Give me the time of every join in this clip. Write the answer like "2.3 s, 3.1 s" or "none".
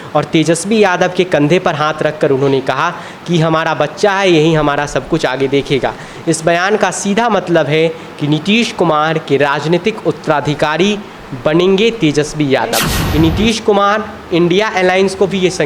13.0 s

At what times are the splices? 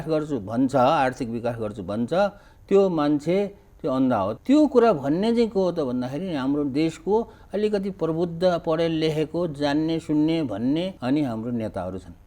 4.4 s, 10.9 s

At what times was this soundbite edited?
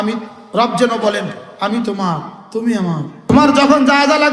3.2 s

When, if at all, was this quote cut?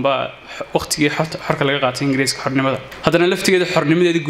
2.9 s

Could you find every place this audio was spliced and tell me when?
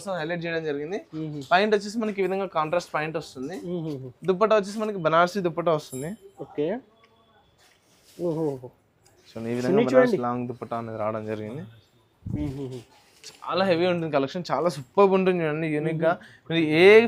none

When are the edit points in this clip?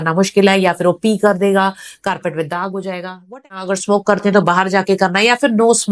3.6 s

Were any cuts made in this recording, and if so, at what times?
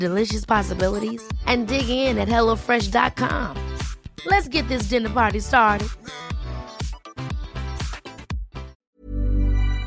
8.9 s

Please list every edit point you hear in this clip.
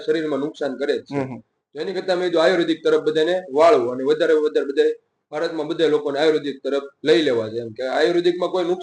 none

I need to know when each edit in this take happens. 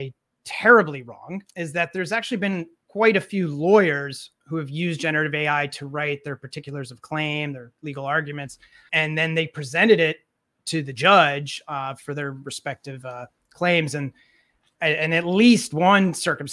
1.4 s, 2.8 s, 8.8 s

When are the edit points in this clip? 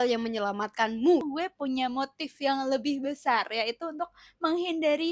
1.2 s

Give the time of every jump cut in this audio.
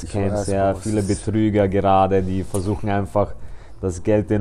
none

